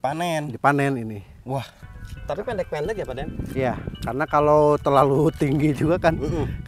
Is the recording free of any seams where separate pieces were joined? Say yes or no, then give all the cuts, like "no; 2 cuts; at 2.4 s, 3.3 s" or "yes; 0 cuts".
no; 1 cut; at 1.7 s